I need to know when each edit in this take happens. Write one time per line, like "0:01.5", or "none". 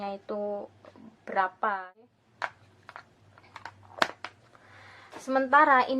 0:01.9